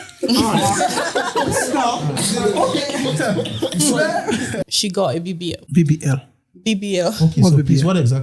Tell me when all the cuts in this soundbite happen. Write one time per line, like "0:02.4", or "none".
0:04.6
0:05.6